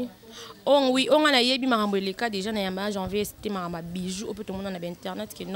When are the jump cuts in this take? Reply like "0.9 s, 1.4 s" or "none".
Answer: none